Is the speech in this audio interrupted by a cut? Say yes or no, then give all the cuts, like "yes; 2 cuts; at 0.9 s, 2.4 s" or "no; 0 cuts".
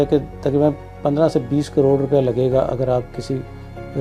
no; 0 cuts